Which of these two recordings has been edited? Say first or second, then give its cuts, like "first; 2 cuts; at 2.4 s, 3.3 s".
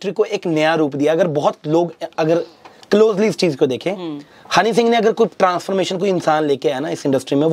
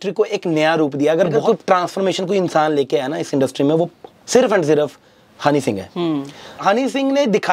second; 2 cuts; at 1.4 s, 6.6 s